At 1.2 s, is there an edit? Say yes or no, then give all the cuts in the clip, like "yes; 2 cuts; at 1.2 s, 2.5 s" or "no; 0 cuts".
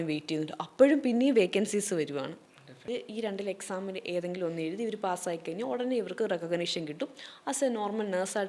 no; 1 cut; at 2.9 s